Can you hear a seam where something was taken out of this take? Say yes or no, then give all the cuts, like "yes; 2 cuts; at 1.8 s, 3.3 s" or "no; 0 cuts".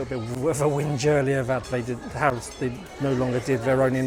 no; 0 cuts